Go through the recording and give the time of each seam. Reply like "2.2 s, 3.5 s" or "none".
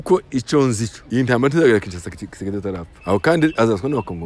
0.9 s, 2.9 s